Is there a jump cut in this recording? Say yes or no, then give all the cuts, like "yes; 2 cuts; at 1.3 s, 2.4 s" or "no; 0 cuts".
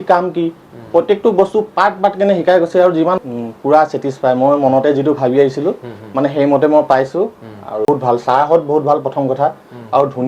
yes; 2 cuts; at 3.2 s, 7.9 s